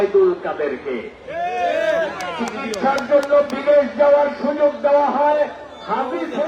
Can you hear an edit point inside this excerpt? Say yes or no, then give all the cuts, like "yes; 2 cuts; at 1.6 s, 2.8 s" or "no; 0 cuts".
no; 0 cuts